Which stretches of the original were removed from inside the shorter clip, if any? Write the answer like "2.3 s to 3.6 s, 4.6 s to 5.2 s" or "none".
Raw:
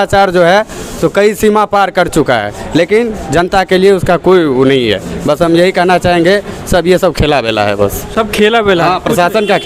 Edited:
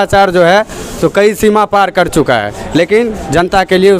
none